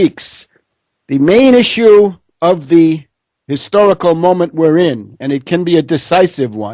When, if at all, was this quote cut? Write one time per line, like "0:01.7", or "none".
none

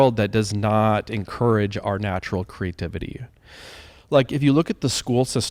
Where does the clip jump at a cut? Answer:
none

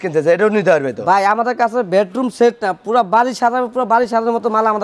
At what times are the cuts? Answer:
none

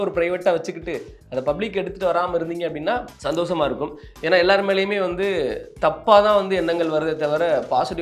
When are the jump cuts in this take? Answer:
0:03.1

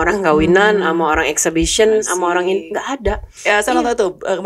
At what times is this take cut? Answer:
0:03.3

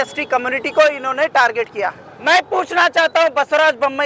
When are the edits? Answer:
0:02.1

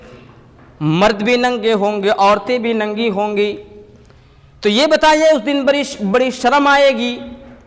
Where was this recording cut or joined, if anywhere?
none

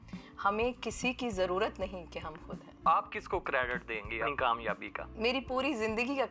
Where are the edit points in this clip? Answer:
0:02.9
0:04.3

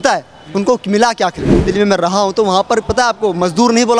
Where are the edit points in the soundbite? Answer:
0:01.6

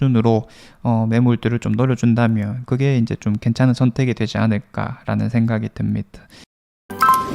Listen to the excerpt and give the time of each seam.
0:06.3

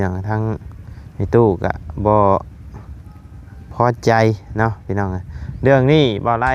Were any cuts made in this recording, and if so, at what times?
none

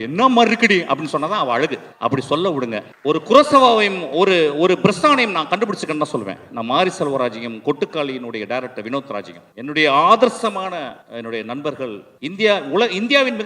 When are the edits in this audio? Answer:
0:01.9
0:02.9
0:09.4
0:11.0
0:12.1

